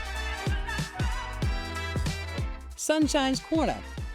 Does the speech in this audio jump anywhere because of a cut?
yes; 1 cut; at 2.5 s

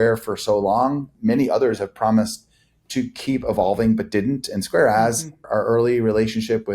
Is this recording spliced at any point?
yes; 2 cuts; at 1.1 s, 5.5 s

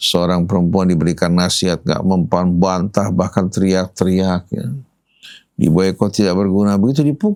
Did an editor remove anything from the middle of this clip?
no; 0 cuts

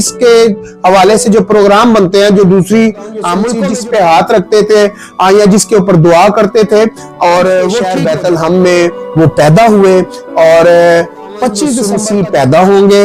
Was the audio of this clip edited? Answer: yes; 3 cuts; at 3.5 s, 7.9 s, 11.8 s

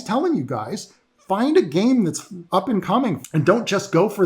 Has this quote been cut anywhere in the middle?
yes; 1 cut; at 3.2 s

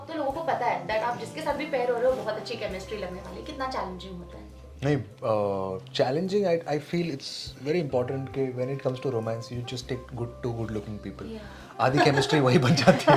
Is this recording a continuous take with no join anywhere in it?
yes; 0 cuts

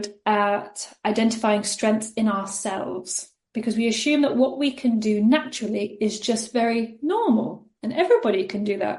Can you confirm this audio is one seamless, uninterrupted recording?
yes; 0 cuts

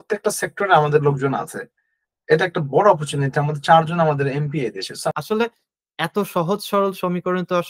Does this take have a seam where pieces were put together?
yes; 1 cut; at 5.1 s

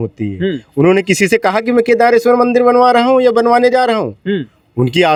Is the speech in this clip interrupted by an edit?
no; 0 cuts

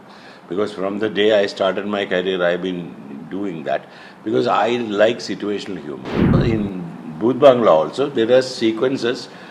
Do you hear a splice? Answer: yes; 1 cut; at 6.4 s

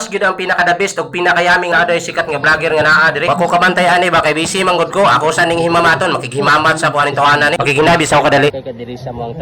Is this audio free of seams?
no; 1 cut; at 1.7 s

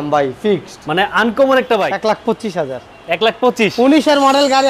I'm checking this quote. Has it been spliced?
yes; 1 cut; at 1.9 s

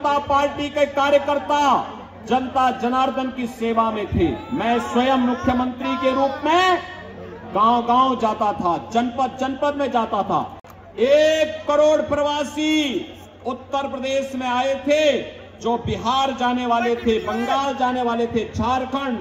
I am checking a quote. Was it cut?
no; 0 cuts

